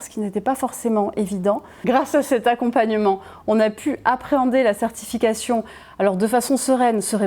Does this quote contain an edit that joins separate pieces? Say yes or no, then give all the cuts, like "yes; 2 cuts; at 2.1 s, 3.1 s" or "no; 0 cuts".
yes; 1 cut; at 1.7 s